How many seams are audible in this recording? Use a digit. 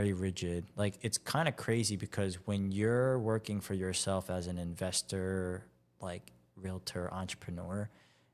0